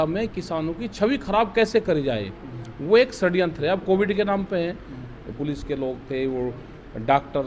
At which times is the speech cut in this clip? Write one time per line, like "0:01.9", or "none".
0:05.3